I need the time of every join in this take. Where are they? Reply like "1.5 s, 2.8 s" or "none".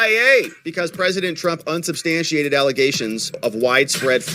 3.3 s